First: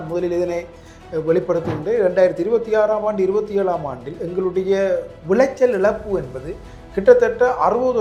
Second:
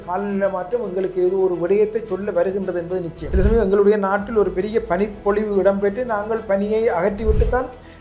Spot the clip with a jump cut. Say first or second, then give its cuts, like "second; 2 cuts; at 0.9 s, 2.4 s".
second; 1 cut; at 3.3 s